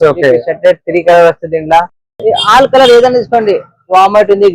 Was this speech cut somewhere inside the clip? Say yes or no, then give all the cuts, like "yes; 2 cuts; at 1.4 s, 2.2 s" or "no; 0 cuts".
yes; 1 cut; at 2.0 s